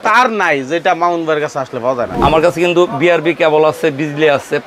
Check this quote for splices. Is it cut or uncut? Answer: cut